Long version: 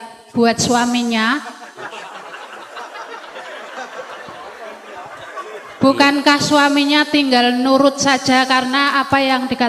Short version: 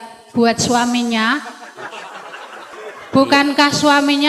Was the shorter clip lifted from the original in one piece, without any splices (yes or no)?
no